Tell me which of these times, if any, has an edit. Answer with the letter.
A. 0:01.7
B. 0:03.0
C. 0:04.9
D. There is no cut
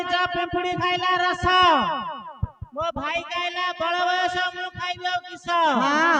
D